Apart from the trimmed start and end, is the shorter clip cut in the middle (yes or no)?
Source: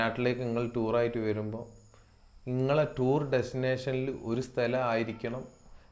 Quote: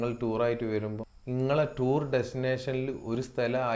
yes